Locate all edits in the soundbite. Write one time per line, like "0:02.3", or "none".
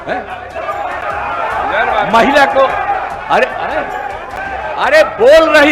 none